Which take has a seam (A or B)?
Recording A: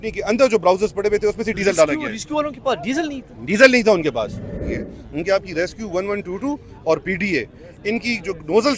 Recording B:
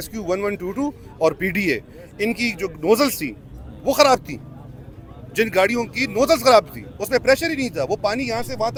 A